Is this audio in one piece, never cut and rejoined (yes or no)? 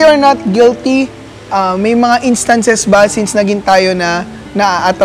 yes